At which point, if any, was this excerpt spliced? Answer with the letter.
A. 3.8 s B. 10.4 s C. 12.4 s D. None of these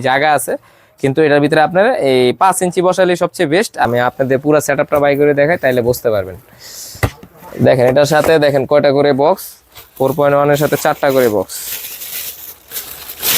A